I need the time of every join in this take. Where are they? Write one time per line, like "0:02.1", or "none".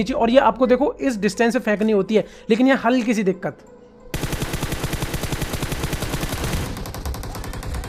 none